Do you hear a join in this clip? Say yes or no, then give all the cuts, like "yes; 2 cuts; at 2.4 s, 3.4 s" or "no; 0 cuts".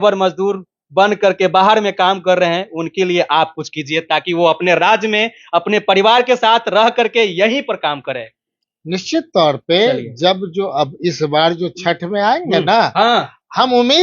no; 0 cuts